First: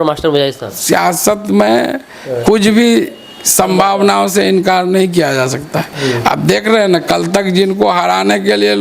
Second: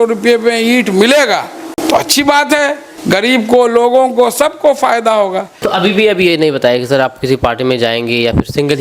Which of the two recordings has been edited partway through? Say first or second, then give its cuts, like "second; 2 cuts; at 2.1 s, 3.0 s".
second; 3 cuts; at 1.7 s, 2.9 s, 5.6 s